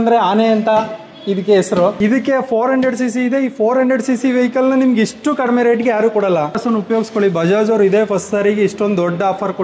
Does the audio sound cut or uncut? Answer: cut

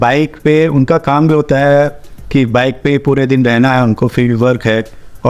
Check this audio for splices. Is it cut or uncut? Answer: uncut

